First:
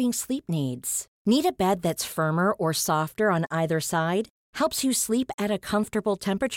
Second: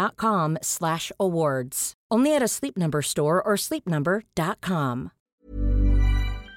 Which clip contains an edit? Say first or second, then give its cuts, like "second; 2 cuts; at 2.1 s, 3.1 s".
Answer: second; 1 cut; at 5.5 s